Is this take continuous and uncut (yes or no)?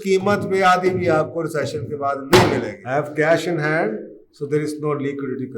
no